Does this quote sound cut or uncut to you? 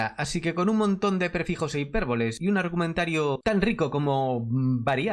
uncut